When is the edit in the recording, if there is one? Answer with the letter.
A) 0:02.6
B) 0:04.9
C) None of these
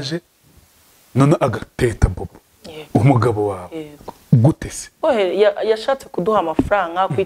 B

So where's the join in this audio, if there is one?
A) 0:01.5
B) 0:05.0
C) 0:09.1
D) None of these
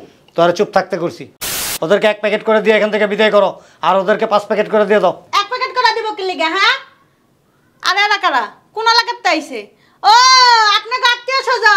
A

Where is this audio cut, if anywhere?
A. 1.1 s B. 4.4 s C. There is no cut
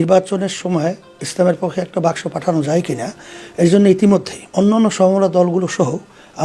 B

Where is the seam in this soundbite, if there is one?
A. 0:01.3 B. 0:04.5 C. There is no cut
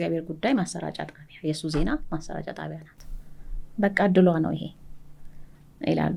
C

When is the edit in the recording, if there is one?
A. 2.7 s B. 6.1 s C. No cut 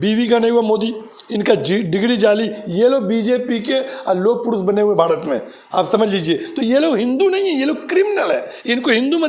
C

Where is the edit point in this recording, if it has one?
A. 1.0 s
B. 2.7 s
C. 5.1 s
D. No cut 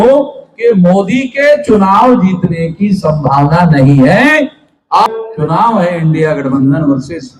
C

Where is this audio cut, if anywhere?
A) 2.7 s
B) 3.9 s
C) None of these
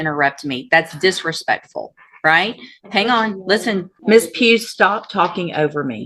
B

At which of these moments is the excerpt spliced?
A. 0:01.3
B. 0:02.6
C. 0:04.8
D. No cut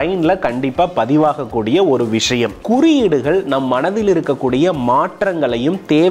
B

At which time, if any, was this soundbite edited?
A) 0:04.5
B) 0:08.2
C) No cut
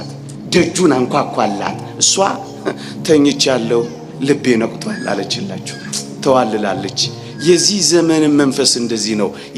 C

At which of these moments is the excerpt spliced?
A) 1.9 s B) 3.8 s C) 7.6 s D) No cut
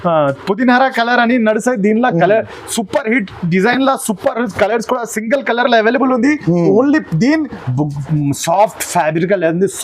C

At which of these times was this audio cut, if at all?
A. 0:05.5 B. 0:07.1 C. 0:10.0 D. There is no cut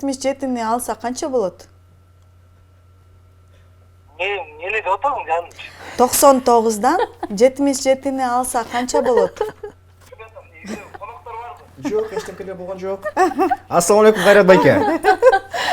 C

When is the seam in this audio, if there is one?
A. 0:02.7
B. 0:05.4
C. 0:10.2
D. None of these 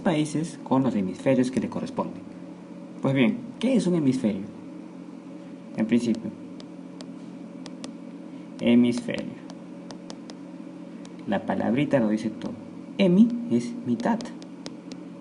D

